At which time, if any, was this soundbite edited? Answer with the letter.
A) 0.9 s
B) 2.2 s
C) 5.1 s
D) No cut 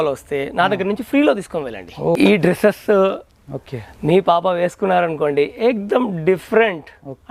B